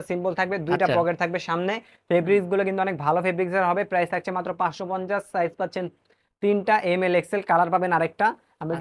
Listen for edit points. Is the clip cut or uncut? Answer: uncut